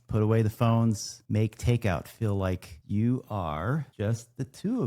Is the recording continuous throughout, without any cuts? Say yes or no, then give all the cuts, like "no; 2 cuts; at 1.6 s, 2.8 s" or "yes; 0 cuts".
no; 3 cuts; at 1.1 s, 2.7 s, 3.9 s